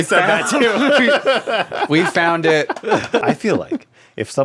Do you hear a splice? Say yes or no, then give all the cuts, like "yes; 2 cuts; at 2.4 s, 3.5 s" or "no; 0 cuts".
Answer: yes; 1 cut; at 3.2 s